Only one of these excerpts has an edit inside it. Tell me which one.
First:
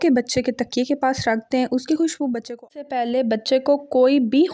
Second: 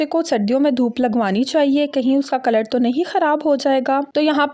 first; 1 cut; at 2.8 s

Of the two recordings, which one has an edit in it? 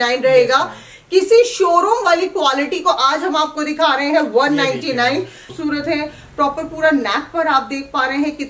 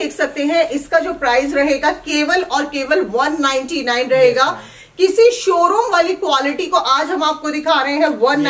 first; 1 cut; at 5.5 s

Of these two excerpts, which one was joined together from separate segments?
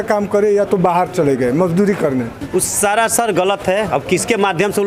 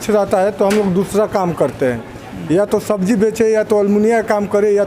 first; 1 cut; at 2.4 s

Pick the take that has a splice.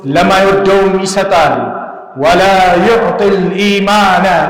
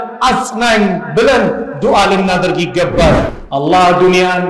second; 1 cut; at 3.4 s

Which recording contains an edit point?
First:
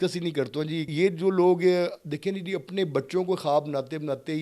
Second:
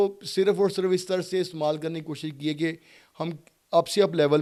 first; 1 cut; at 0.9 s

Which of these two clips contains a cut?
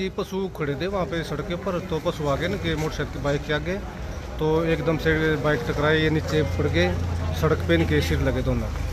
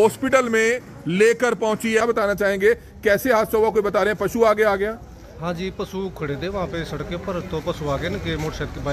second; 1 cut; at 2.0 s

